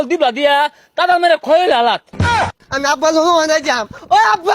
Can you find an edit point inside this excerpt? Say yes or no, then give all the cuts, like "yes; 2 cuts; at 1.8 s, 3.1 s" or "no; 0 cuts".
yes; 1 cut; at 2.3 s